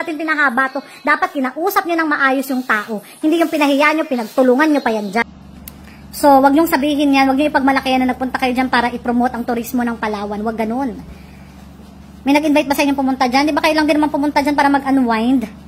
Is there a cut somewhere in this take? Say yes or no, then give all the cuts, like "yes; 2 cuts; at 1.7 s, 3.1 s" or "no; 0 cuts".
yes; 1 cut; at 5.3 s